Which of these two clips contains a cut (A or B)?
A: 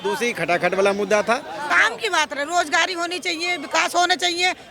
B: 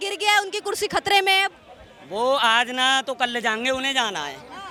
A